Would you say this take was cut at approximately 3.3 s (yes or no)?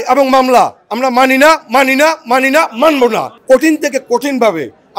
yes